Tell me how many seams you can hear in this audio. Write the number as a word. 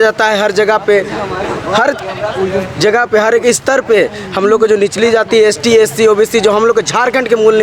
zero